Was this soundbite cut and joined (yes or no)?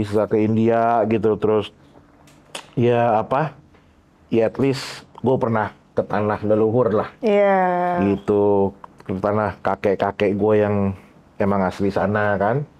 no